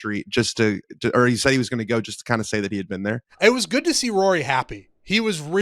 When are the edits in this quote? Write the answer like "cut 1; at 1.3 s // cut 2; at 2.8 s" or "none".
cut 1; at 3.3 s